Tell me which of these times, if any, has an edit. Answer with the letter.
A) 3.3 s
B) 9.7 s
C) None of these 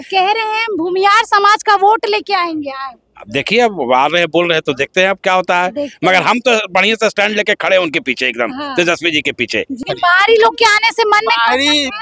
B